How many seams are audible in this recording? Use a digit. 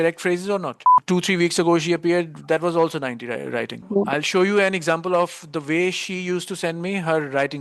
2